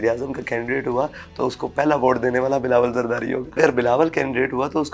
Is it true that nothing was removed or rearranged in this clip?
no; 1 cut; at 3.6 s

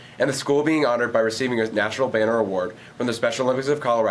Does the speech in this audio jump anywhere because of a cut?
yes; 1 cut; at 1.9 s

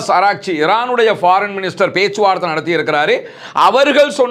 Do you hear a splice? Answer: no; 0 cuts

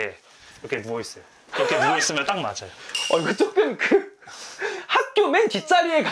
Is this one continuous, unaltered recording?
yes; 0 cuts

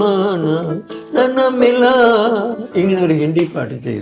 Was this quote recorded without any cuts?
no; 1 cut; at 2.6 s

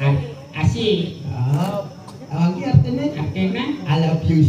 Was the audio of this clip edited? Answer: no; 0 cuts

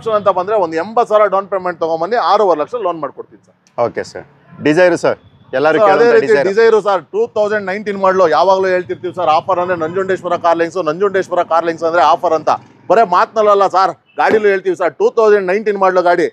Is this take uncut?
yes; 0 cuts

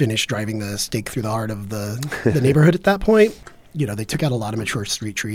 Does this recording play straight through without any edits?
no; 1 cut; at 3.4 s

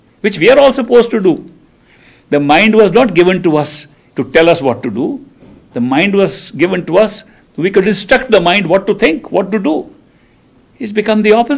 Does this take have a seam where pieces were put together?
yes; 1 cut; at 4.6 s

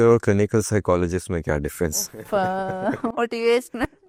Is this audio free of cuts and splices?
yes; 0 cuts

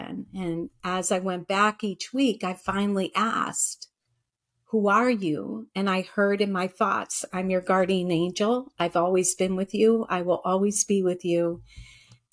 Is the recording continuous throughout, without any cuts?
yes; 0 cuts

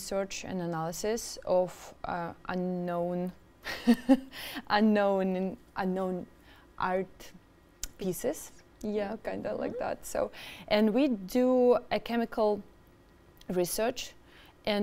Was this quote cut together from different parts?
no; 0 cuts

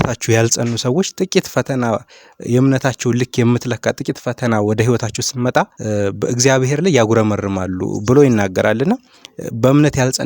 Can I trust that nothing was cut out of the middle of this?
no; 1 cut; at 5.8 s

